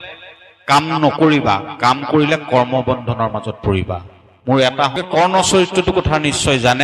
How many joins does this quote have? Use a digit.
1